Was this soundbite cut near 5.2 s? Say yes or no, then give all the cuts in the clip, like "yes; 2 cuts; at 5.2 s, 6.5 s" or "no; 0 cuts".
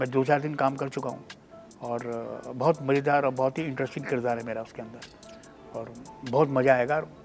no; 0 cuts